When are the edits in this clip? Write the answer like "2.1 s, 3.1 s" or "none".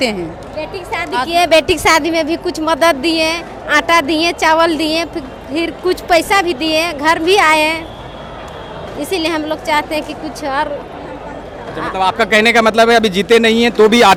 none